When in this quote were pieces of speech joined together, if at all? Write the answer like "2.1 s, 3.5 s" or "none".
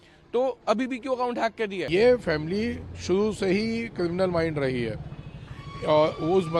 1.8 s